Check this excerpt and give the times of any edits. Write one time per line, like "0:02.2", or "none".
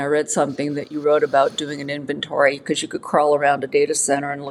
none